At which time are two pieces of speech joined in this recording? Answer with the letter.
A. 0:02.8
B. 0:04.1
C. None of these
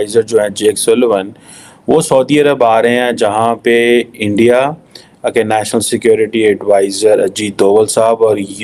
C